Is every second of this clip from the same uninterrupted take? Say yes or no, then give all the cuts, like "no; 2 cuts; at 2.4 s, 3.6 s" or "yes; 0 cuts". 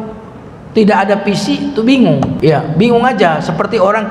no; 1 cut; at 2.3 s